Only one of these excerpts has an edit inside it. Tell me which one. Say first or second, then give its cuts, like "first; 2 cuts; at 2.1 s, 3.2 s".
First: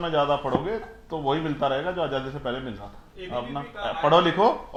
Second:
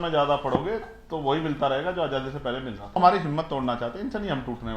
second; 1 cut; at 3.0 s